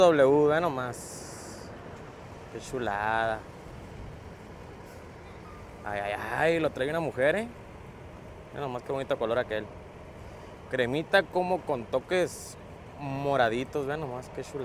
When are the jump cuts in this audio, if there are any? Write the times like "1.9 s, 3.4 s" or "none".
none

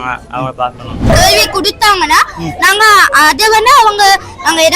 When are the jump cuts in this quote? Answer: 1.1 s

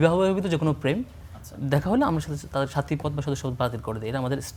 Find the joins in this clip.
none

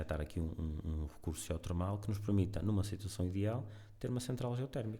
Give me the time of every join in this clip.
none

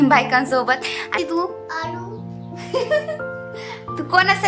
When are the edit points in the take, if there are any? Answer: 1.0 s

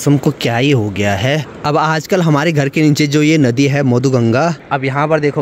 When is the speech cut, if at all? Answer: 1.5 s, 4.6 s

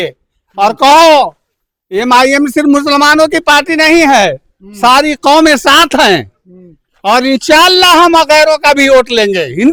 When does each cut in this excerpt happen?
none

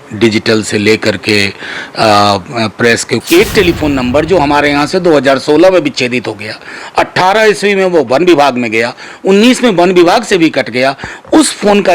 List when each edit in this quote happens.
3.1 s

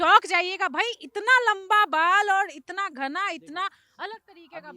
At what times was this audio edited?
none

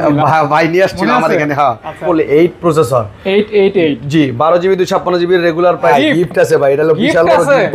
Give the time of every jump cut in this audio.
1.9 s, 5.9 s

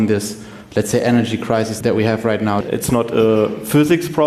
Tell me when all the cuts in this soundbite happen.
1.7 s, 2.6 s

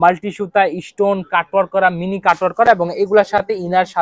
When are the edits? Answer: none

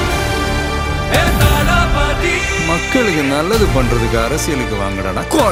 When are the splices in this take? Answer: none

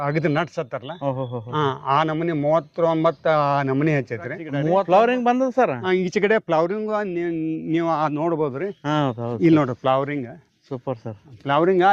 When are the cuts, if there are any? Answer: 4.9 s

